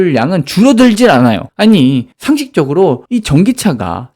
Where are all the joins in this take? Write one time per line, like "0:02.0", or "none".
0:03.0